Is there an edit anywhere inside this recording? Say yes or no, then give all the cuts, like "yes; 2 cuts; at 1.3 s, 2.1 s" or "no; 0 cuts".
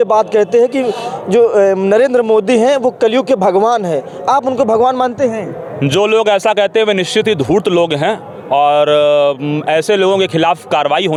no; 0 cuts